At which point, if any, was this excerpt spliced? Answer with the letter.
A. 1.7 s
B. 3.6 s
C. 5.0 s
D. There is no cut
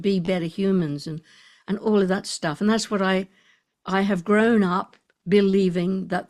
D